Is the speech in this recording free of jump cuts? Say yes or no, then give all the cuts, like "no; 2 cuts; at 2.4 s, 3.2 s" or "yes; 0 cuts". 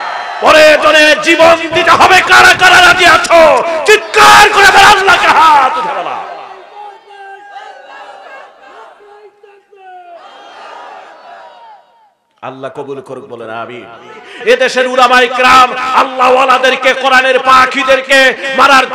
no; 1 cut; at 14.3 s